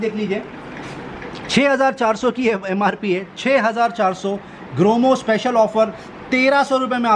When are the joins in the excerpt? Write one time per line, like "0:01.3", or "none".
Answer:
none